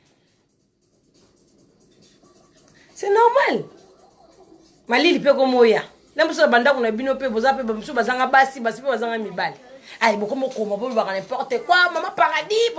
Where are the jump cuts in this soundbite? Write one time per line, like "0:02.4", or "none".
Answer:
none